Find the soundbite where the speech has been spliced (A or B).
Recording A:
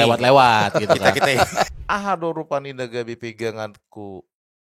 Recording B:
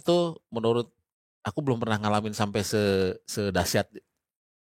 A